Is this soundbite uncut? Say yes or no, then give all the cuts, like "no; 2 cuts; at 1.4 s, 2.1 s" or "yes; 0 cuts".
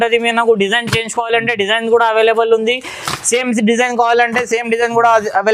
yes; 0 cuts